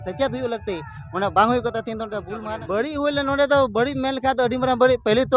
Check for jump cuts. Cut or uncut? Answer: cut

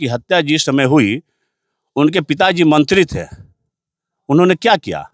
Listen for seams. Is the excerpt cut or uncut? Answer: uncut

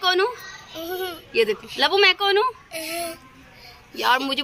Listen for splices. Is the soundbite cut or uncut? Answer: uncut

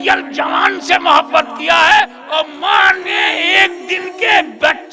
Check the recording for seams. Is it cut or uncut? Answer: uncut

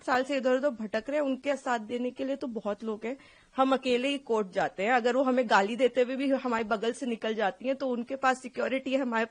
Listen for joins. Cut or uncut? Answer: uncut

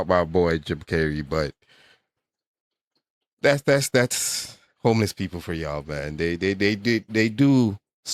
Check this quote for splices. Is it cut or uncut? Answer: uncut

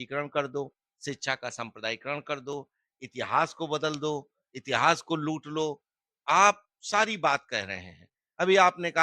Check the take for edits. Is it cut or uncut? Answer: uncut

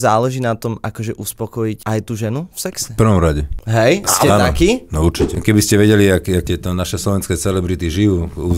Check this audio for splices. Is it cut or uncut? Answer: cut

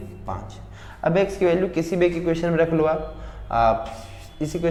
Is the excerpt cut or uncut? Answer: uncut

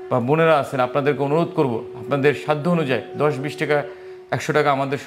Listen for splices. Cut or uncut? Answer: uncut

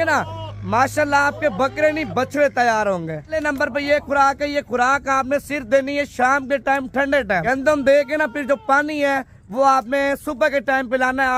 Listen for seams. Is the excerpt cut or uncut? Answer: cut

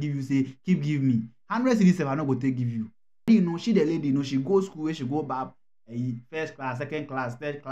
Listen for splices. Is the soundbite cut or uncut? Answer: cut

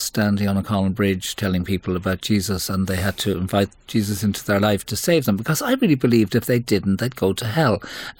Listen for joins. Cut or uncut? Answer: uncut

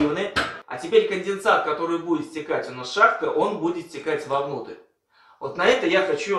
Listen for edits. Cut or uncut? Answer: uncut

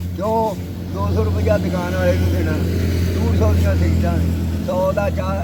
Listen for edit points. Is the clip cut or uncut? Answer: uncut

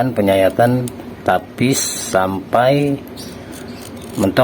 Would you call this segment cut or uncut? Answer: uncut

